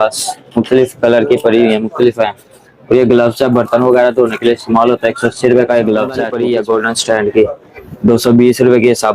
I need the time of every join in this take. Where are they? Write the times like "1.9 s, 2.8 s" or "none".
6.3 s